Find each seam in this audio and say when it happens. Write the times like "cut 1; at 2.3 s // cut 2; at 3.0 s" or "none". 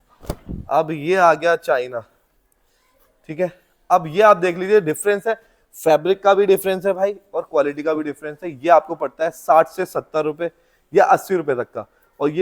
none